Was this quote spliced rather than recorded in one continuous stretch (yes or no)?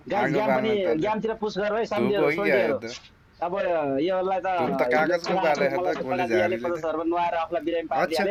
no